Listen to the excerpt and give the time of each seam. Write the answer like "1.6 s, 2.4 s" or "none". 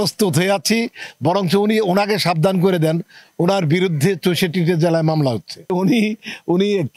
5.7 s